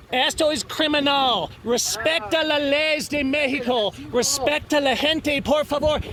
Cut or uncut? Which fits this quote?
uncut